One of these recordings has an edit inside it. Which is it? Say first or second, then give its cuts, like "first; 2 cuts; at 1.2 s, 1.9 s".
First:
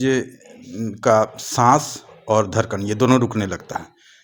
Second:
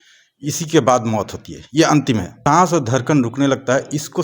second; 1 cut; at 2.3 s